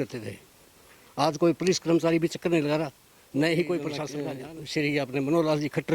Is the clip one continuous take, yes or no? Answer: no